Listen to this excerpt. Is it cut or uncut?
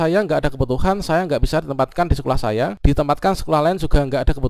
cut